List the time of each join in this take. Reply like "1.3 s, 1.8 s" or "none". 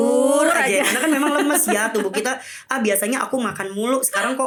none